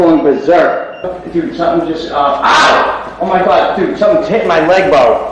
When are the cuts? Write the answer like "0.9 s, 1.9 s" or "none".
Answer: 1.2 s